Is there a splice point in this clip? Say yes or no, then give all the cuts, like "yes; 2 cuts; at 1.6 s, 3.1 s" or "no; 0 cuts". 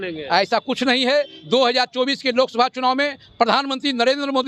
no; 0 cuts